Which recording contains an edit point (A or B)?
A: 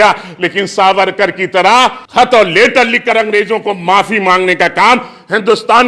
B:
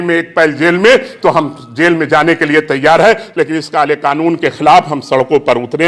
A